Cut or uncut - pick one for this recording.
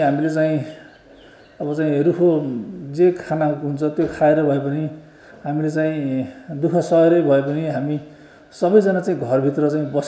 uncut